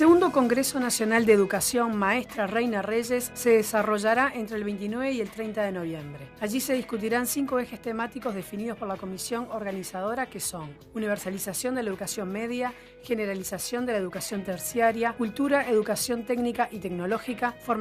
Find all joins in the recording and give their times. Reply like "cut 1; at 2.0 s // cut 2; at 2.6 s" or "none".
cut 1; at 14.9 s